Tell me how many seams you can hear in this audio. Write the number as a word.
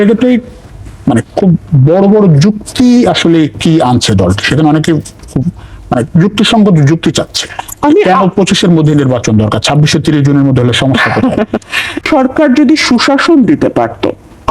one